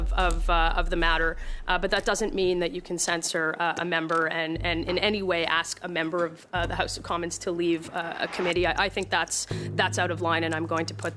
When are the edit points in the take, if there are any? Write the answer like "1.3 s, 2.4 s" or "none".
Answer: none